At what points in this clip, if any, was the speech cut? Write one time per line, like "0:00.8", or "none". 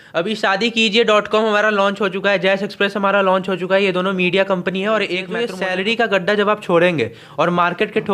0:05.4